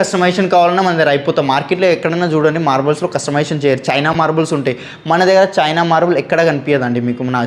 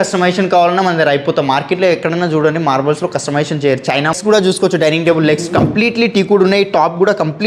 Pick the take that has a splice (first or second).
second